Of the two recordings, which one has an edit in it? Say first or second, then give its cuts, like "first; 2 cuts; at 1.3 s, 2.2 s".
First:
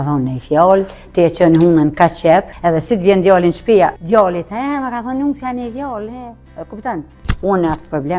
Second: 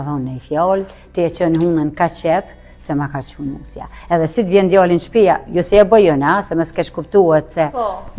first; 3 cuts; at 2.5 s, 4.0 s, 7.2 s